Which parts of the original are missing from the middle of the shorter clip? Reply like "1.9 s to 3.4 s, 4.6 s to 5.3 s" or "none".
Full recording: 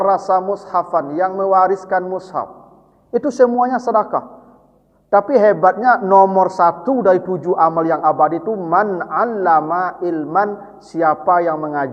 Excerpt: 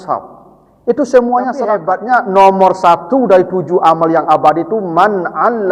4.1 s to 5.6 s